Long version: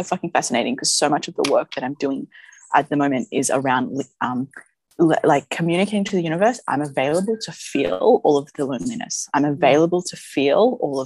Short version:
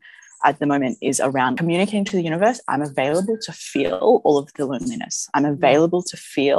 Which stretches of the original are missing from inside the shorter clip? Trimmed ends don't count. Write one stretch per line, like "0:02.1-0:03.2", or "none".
0:03.9-0:05.6

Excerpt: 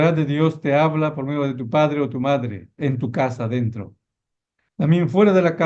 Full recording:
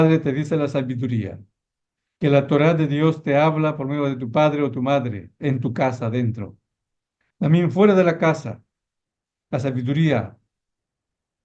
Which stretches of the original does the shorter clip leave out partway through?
none

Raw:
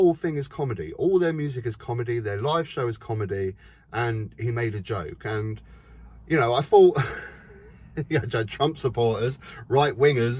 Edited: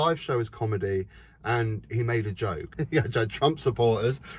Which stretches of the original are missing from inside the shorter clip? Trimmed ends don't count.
0:05.1-0:07.8

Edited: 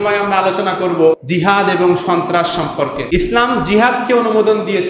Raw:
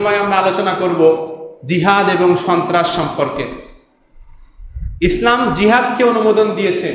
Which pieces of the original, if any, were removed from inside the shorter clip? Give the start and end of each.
0:01.2-0:01.6
0:03.4-0:04.9

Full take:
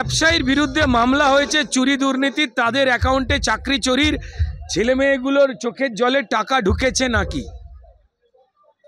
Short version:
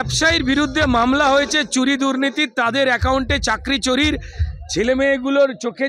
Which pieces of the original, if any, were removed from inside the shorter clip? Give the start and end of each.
none

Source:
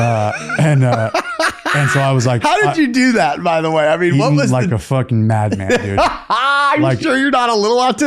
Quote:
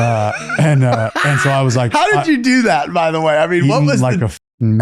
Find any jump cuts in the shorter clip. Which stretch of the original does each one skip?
0:01.1-0:01.6

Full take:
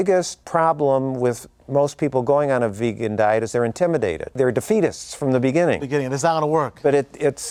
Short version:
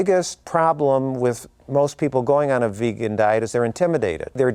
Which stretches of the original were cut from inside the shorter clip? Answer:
none

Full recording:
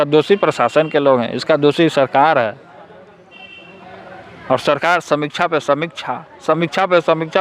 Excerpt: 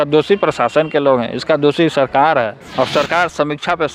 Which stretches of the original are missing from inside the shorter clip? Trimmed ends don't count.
0:02.6-0:04.3

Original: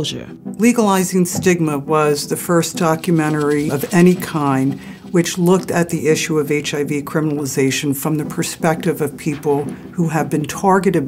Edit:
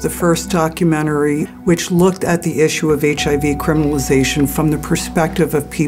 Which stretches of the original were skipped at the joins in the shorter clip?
0:03.8-0:05.0

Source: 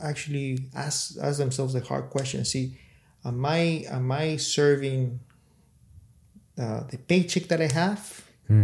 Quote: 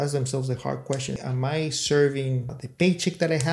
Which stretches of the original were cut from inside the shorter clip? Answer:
0:02.5-0:03.9
0:05.3-0:06.9

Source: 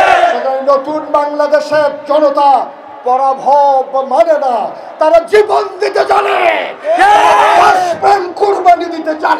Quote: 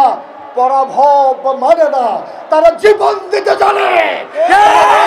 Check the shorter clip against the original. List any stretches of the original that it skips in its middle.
none

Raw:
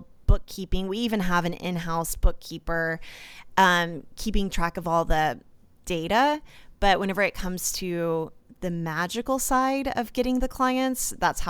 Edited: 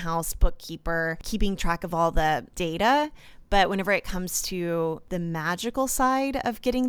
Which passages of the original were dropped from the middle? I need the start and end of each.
0:03.0-0:04.1
0:05.4-0:05.8
0:08.3-0:08.5

